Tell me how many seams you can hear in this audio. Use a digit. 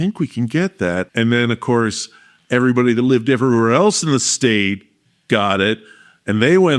1